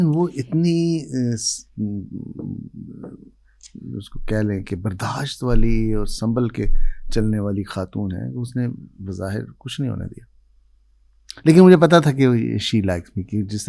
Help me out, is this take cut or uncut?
uncut